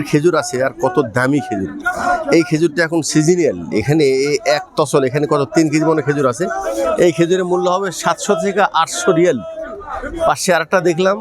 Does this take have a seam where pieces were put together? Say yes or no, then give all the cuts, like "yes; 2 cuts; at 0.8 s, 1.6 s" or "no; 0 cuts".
no; 0 cuts